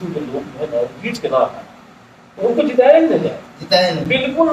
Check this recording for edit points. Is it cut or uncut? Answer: uncut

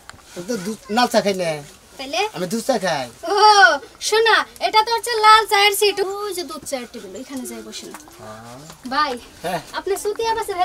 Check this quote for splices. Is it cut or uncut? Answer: cut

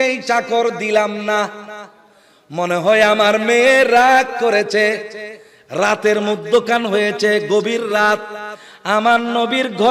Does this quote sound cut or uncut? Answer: uncut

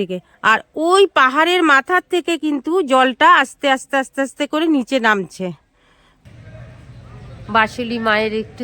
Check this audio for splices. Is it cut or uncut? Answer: cut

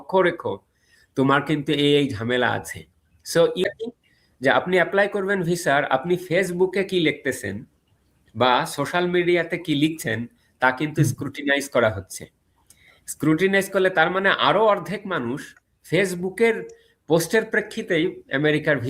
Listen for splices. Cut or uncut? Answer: cut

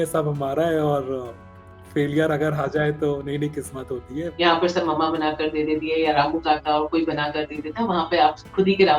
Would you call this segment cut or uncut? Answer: cut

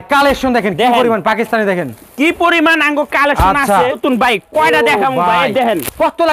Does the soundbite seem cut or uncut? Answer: cut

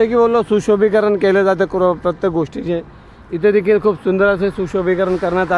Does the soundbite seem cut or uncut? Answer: uncut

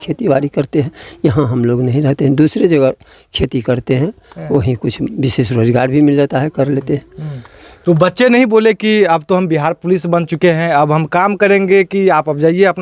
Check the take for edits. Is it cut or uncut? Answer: uncut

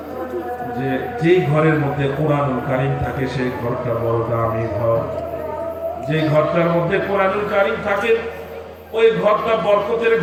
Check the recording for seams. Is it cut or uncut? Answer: uncut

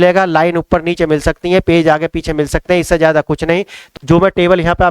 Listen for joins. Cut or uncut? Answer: cut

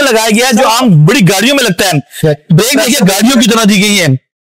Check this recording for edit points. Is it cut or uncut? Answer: cut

